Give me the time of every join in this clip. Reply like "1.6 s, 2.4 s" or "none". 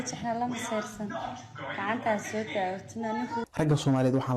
3.4 s